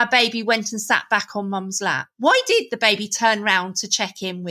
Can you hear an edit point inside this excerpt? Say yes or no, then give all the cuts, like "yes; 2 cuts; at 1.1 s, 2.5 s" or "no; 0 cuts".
no; 0 cuts